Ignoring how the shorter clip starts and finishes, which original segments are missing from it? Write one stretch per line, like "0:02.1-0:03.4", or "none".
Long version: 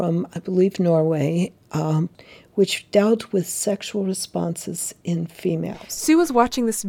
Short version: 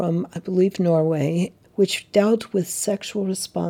0:01.6-0:02.4